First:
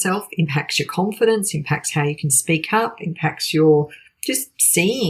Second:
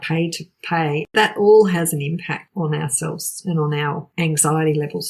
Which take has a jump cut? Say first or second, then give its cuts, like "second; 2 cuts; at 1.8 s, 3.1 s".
second; 3 cuts; at 1.1 s, 2.5 s, 4.1 s